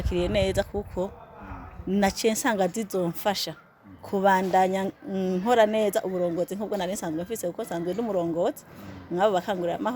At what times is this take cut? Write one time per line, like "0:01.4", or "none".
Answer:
none